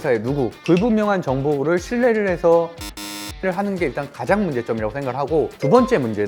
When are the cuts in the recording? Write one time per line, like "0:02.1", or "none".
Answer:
none

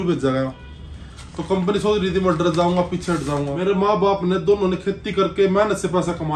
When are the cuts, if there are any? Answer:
0:03.5

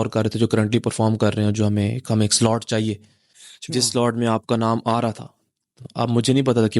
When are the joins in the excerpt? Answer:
none

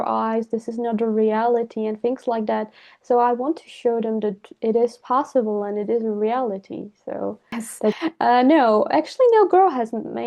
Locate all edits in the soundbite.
0:08.0

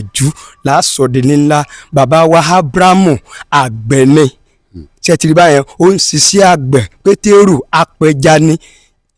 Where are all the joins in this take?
none

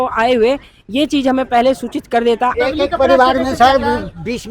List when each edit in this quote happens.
0:02.6

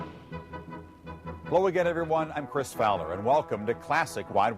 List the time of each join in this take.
0:01.8

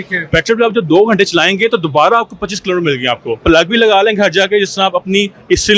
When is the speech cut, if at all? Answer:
0:03.4

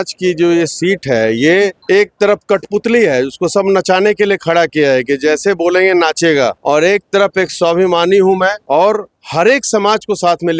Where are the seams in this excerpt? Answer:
0:01.8
0:06.6
0:08.6

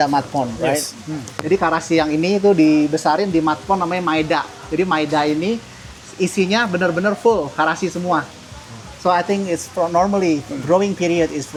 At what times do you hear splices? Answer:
none

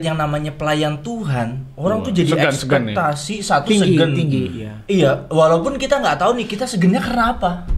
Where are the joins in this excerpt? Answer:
none

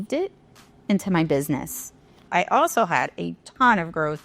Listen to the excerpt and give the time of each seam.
0:01.9

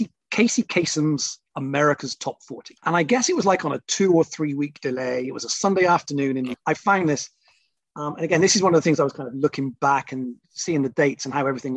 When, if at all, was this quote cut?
0:02.8
0:06.6

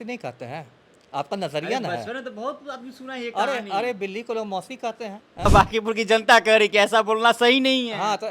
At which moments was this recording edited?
0:05.5

